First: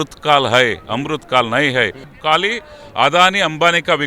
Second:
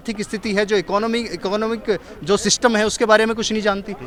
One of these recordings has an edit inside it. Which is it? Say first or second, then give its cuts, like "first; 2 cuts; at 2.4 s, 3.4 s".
first; 1 cut; at 2.1 s